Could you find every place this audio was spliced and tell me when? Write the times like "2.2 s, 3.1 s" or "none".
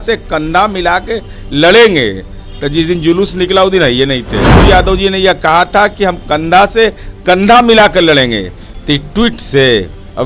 4.6 s